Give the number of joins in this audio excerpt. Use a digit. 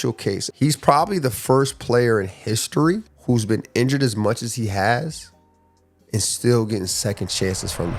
0